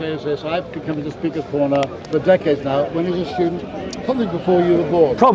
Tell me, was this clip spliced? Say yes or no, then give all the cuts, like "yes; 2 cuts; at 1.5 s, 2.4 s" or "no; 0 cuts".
yes; 1 cut; at 2.0 s